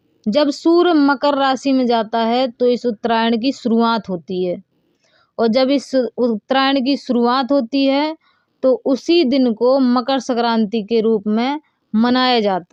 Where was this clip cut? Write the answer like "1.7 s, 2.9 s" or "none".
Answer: none